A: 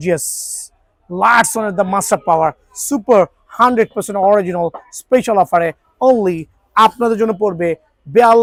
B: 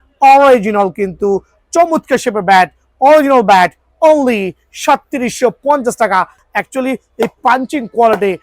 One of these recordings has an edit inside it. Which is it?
B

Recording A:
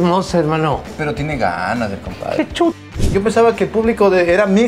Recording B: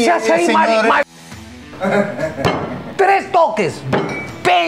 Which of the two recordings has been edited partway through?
A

